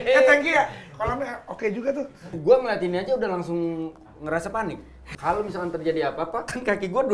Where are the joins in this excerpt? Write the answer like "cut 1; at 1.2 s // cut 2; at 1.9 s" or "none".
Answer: cut 1; at 2.4 s // cut 2; at 5.0 s